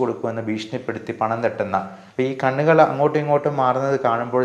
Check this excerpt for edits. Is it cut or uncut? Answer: cut